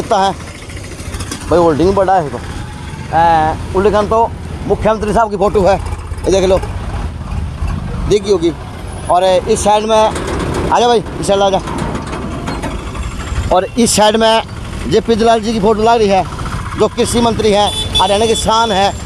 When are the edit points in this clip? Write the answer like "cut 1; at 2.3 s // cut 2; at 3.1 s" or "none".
none